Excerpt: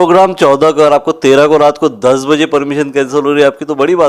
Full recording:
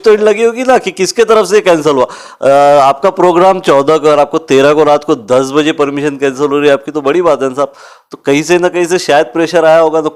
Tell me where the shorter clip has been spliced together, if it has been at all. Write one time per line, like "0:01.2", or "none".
none